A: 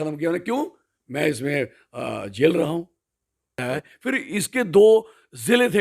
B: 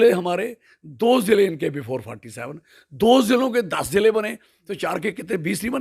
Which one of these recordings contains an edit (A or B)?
A